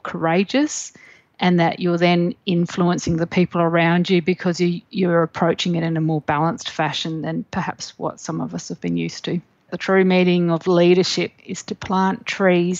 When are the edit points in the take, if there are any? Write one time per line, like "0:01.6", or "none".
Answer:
0:09.8